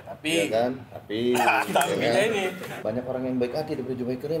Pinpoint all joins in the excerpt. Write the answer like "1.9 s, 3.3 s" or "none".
2.7 s